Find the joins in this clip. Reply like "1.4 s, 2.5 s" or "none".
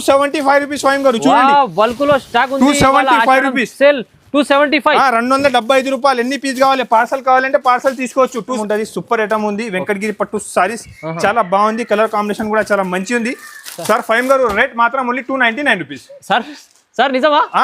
8.6 s